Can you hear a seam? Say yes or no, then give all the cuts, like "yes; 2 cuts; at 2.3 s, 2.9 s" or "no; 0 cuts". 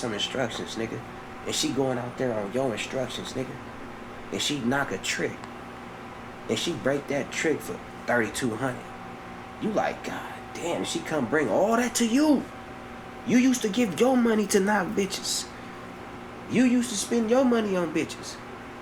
no; 0 cuts